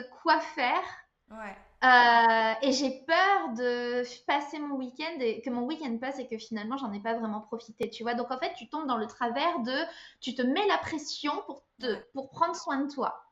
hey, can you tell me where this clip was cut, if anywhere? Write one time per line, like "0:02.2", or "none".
none